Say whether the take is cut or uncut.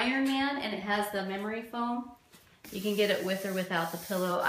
uncut